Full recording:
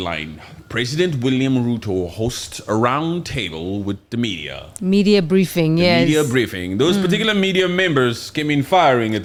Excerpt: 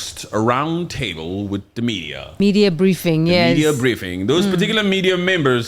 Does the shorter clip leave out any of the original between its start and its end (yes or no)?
yes